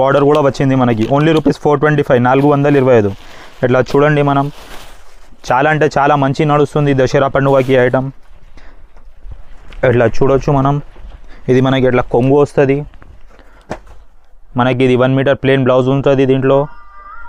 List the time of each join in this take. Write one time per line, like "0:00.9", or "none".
none